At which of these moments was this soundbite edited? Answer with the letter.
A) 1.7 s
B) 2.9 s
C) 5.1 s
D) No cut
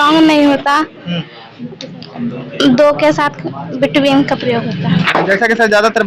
C